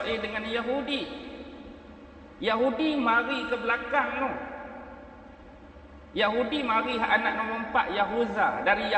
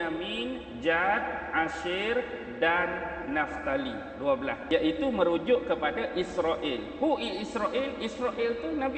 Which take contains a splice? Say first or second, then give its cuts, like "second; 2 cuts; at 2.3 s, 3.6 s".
second; 1 cut; at 4.6 s